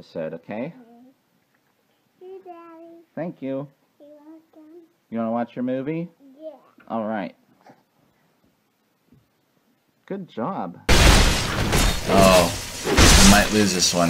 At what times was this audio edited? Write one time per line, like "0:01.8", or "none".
0:06.3